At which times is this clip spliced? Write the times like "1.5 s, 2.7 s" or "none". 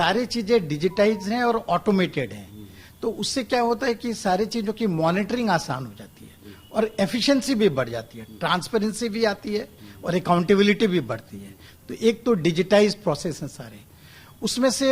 none